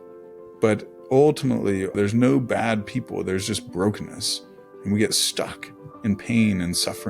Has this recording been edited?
yes; 1 cut; at 1.9 s

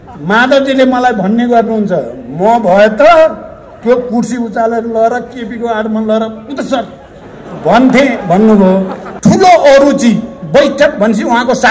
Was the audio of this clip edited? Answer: yes; 1 cut; at 9.0 s

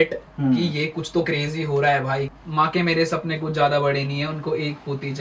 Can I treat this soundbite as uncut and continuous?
no; 1 cut; at 2.4 s

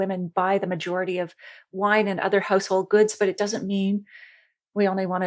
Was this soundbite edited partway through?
no; 0 cuts

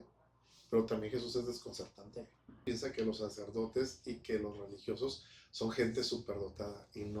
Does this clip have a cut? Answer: yes; 1 cut; at 2.6 s

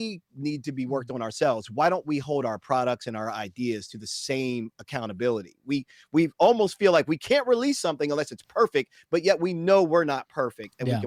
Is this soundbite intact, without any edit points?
yes; 0 cuts

